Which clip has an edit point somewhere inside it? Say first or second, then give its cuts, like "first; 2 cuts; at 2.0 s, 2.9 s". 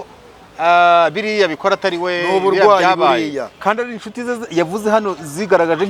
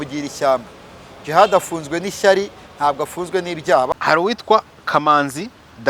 second; 1 cut; at 3.9 s